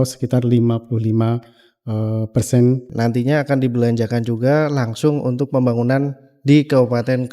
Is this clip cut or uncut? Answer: cut